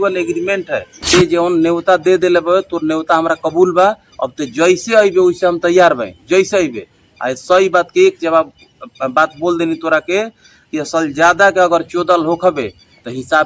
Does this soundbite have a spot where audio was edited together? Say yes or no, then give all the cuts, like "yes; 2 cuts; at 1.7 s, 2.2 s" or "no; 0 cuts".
yes; 1 cut; at 1.1 s